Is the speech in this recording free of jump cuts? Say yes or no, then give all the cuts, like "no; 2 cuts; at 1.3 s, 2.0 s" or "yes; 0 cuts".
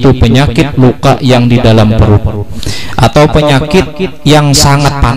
no; 1 cut; at 2.4 s